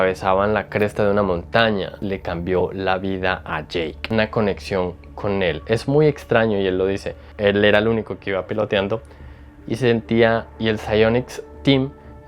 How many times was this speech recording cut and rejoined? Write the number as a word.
four